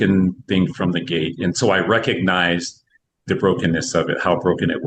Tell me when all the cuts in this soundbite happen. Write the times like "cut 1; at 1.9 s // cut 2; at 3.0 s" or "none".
none